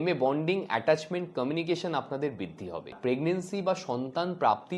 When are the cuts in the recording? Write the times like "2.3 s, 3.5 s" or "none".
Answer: 3.0 s